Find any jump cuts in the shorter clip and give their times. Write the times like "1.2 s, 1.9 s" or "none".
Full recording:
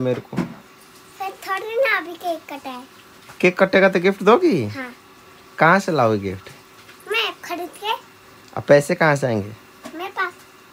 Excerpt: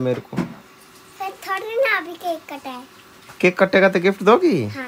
none